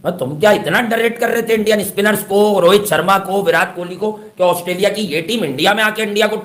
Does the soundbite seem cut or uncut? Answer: uncut